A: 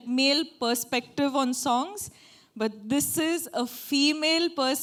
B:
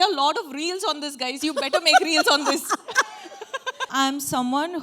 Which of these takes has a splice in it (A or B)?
B